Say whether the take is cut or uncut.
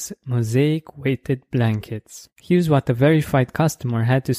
uncut